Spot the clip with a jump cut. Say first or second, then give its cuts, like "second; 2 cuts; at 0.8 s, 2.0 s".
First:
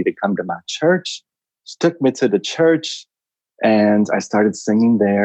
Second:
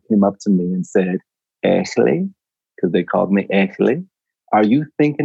second; 1 cut; at 4.2 s